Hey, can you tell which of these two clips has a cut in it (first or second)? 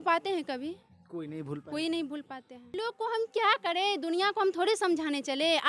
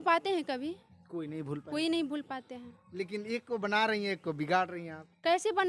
first